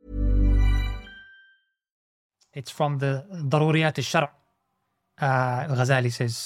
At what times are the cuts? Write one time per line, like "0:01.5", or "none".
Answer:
0:02.1